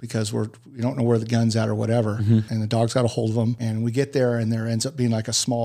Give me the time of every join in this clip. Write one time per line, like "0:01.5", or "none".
0:02.5
0:03.6